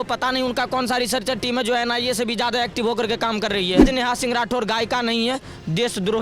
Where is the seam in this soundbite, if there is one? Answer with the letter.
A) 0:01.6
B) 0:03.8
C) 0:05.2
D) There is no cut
B